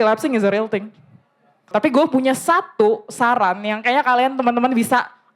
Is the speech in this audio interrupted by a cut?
yes; 1 cut; at 1.7 s

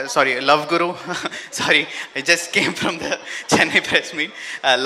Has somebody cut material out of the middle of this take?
no; 0 cuts

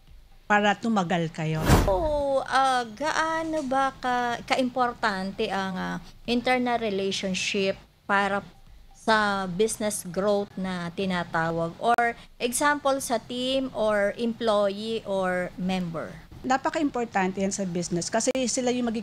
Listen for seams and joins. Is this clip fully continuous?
no; 2 cuts; at 1.9 s, 16.4 s

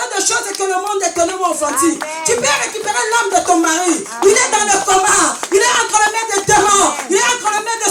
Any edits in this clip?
no; 0 cuts

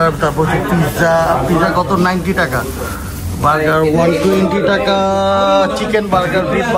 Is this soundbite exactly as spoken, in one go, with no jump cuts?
yes; 0 cuts

